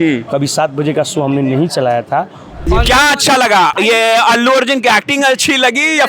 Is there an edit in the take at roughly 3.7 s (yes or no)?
yes